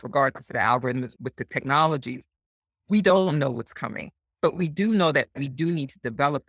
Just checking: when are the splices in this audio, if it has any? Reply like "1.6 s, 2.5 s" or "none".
1.2 s